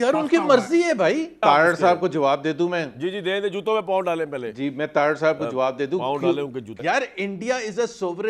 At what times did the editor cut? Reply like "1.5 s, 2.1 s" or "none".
1.4 s, 6.7 s